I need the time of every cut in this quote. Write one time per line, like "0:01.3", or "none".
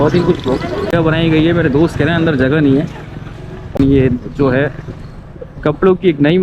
0:00.9
0:03.7